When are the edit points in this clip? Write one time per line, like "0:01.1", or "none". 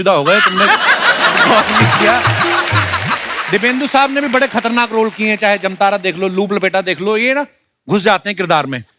0:03.3